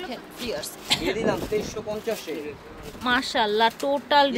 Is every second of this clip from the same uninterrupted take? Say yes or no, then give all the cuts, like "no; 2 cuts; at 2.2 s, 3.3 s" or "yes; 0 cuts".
yes; 0 cuts